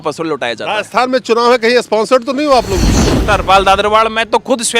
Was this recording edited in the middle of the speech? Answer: yes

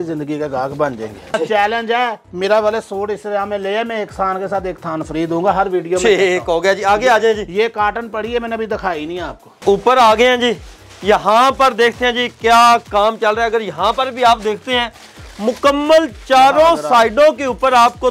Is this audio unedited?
no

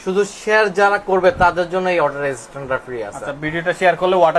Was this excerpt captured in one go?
yes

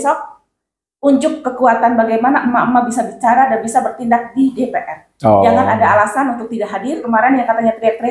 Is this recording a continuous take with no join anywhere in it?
no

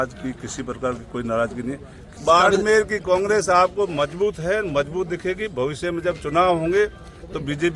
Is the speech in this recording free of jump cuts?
no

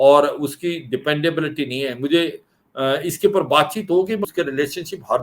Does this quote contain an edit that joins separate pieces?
yes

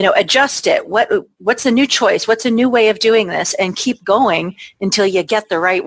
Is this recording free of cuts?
yes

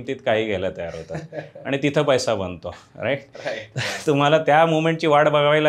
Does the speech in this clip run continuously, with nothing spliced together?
yes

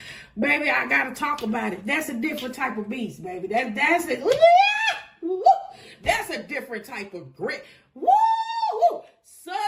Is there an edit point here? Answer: no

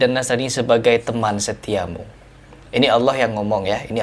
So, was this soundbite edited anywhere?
no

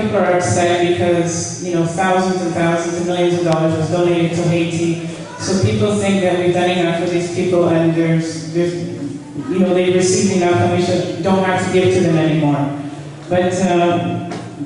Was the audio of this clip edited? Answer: no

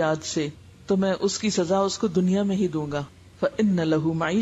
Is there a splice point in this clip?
yes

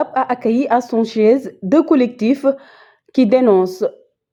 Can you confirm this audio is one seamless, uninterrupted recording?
yes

